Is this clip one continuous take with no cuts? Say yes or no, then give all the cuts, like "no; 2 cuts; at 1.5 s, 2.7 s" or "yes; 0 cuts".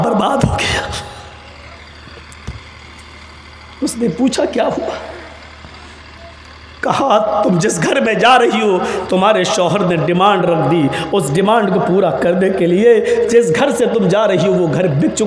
yes; 0 cuts